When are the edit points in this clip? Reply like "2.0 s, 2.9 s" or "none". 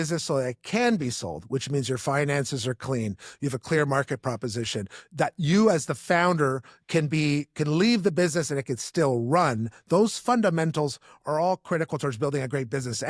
none